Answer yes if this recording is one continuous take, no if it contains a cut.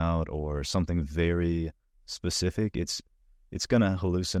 yes